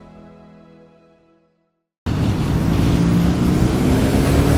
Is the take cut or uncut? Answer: cut